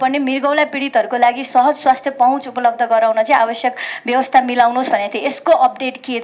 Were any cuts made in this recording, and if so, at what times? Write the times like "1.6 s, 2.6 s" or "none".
none